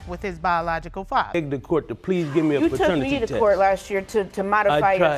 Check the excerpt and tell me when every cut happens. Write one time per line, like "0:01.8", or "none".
0:01.3